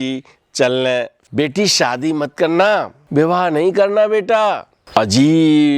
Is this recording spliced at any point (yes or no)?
yes